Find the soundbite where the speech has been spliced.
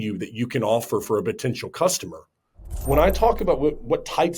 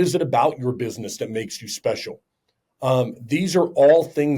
first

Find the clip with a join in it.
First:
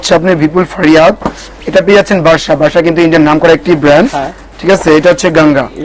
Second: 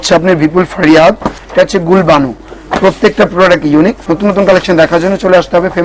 second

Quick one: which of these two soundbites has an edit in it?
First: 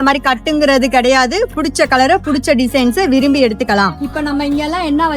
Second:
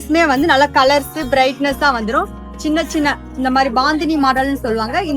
first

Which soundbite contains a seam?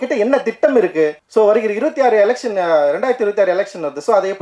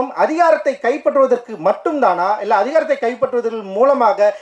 first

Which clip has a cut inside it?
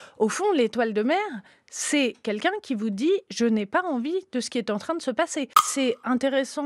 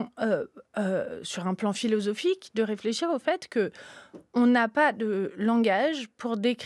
first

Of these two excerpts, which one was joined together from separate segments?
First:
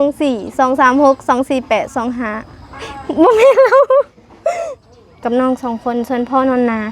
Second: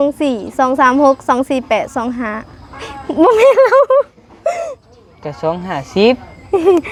first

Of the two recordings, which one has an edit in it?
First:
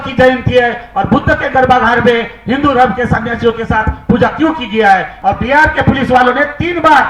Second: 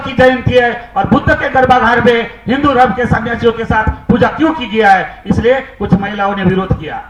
first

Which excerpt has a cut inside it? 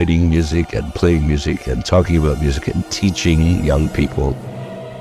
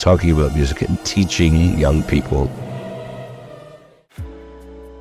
second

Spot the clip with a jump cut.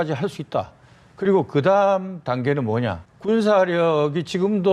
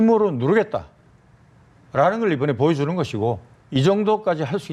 first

